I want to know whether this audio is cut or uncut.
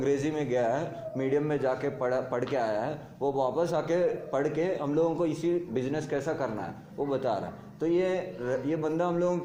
uncut